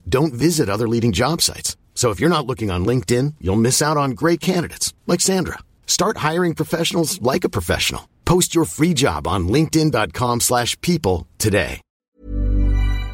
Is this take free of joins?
no; 1 cut; at 12.2 s

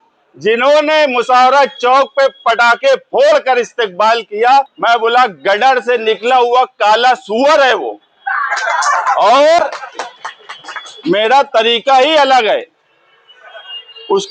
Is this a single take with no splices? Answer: no; 1 cut; at 4.7 s

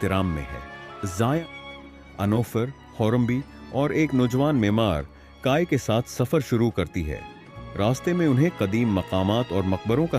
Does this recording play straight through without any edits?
no; 1 cut; at 1.4 s

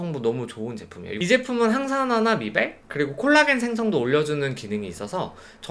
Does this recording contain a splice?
yes; 1 cut; at 1.0 s

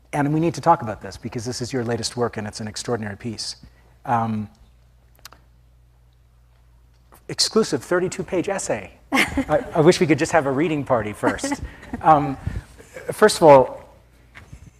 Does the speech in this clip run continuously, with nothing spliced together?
no; 1 cut; at 11.2 s

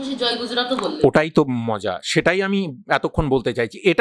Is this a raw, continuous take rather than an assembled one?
yes; 0 cuts

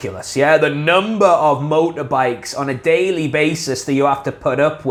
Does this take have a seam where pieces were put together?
no; 0 cuts

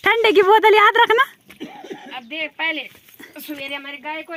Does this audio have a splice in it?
no; 0 cuts

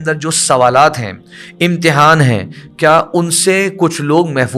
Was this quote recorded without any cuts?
yes; 0 cuts

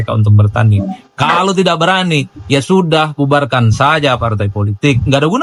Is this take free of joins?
yes; 0 cuts

